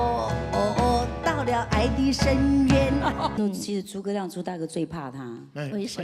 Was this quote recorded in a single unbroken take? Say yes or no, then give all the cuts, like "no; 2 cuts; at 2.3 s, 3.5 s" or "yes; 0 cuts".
no; 1 cut; at 3.4 s